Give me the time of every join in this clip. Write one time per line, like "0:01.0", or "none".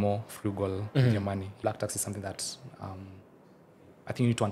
0:01.5